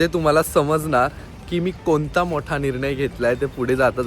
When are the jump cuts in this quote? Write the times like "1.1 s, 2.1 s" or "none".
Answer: none